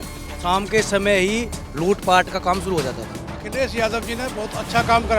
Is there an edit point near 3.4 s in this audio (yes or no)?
yes